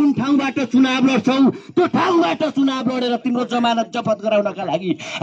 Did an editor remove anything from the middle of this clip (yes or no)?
no